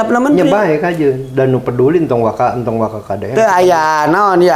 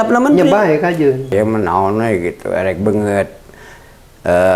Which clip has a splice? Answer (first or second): second